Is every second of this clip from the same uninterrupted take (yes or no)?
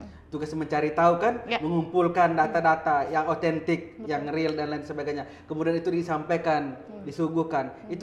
yes